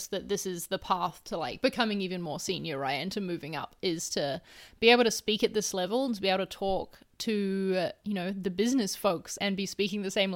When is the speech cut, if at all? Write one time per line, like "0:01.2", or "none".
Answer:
0:09.3